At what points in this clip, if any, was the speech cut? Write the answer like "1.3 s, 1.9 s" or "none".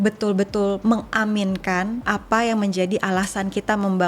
2.0 s